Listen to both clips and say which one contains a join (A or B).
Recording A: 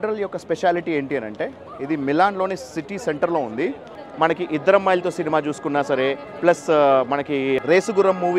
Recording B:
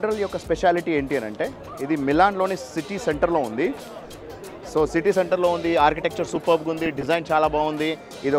A